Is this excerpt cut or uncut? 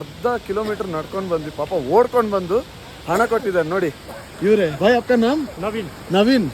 cut